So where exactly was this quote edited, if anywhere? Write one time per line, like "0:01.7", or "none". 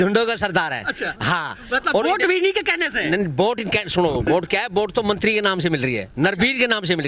none